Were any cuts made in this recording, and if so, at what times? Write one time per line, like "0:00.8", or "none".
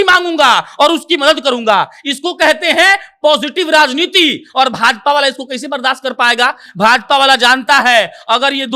none